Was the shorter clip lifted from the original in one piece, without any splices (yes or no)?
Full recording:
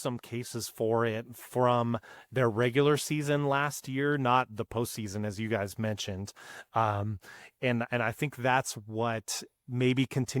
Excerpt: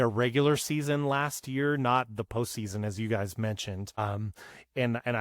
no